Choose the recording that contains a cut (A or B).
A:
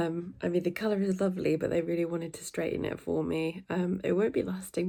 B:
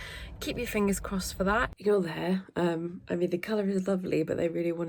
B